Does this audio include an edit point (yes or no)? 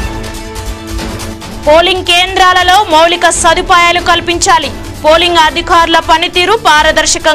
yes